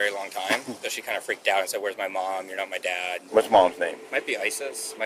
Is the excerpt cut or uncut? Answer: cut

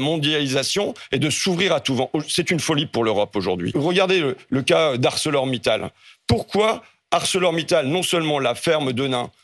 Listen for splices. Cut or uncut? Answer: cut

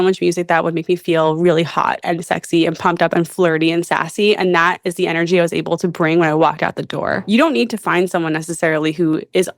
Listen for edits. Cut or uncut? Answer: cut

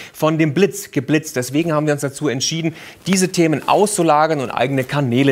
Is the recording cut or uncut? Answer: cut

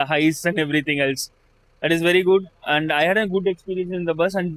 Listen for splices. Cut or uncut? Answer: uncut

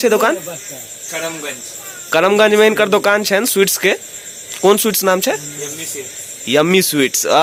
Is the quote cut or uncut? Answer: uncut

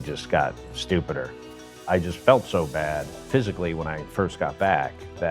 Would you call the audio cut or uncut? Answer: cut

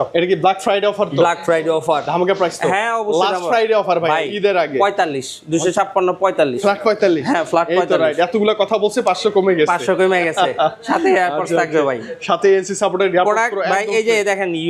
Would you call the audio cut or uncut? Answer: uncut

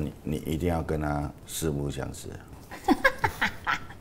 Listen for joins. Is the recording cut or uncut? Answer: cut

